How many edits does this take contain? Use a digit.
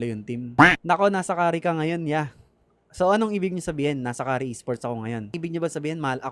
1